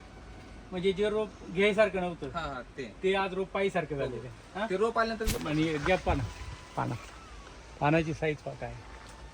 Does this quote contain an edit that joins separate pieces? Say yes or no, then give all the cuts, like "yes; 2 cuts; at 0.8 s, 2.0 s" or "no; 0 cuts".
yes; 1 cut; at 5.3 s